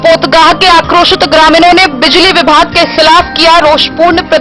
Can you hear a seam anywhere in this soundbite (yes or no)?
no